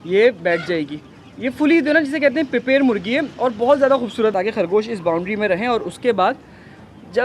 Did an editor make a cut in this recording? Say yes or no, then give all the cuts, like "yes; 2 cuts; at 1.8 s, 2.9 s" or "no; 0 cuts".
yes; 1 cut; at 4.3 s